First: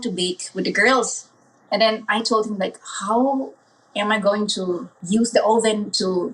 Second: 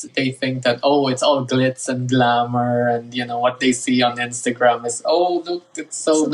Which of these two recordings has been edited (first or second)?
first